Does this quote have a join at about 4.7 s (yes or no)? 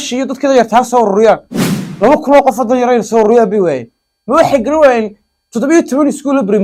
no